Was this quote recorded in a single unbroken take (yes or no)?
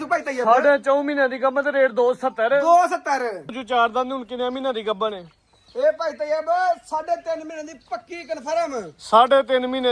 no